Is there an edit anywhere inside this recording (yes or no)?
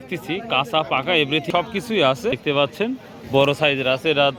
no